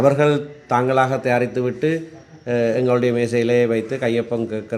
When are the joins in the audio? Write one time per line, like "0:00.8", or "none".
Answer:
none